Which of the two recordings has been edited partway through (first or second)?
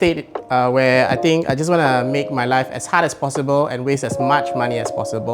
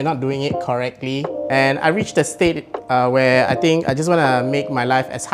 second